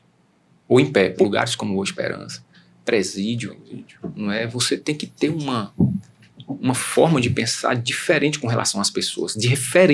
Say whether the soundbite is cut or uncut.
cut